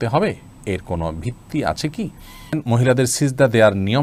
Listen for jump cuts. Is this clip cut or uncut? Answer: cut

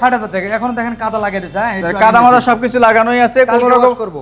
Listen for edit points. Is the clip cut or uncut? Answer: uncut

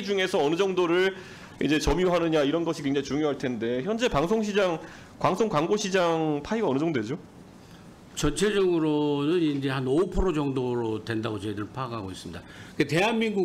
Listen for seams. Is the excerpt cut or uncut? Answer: uncut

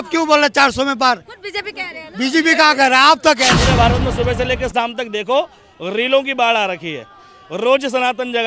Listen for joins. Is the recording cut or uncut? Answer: cut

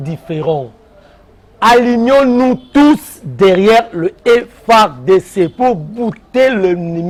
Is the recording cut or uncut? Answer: uncut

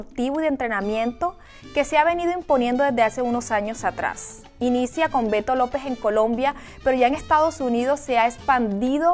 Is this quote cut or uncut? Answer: cut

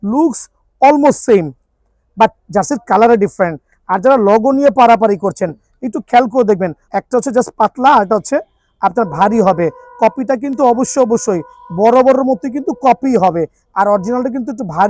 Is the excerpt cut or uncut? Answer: cut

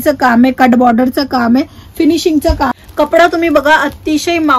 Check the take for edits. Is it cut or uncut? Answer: cut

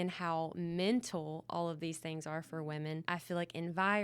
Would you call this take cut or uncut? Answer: cut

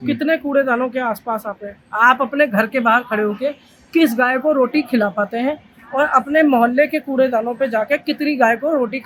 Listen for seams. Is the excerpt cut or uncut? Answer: uncut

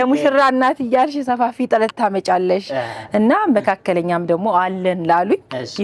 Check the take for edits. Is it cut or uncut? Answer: uncut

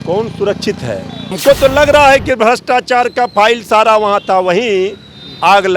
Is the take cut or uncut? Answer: cut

